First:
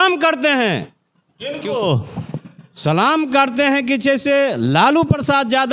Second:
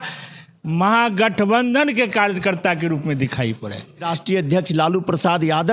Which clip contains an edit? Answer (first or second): second